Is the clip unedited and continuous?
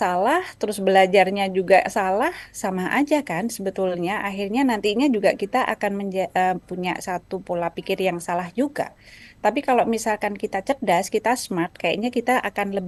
yes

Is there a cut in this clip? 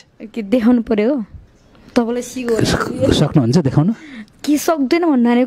no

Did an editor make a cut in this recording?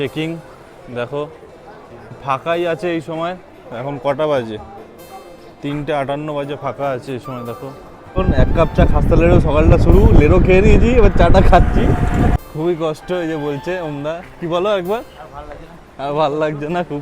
yes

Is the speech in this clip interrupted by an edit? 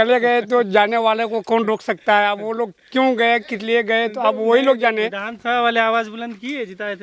no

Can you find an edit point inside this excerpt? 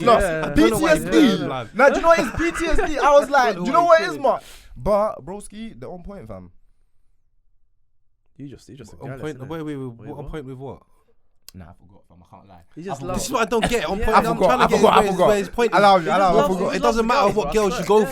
yes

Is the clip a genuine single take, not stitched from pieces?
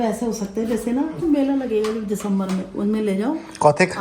no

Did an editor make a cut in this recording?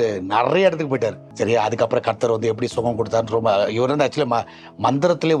yes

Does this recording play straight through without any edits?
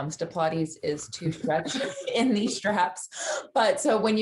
yes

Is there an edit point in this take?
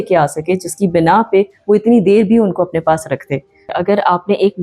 yes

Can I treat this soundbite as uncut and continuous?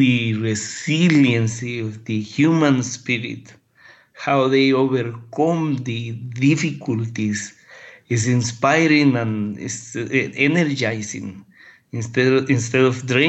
yes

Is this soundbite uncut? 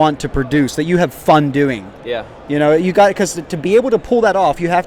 yes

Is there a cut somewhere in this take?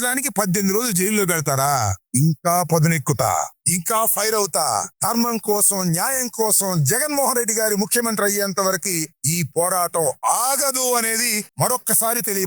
no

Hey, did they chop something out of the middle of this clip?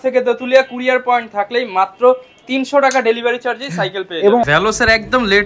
yes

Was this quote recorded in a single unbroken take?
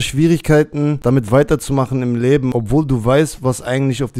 no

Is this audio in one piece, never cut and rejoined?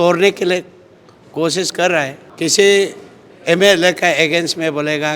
no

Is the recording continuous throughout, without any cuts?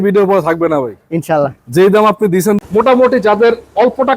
no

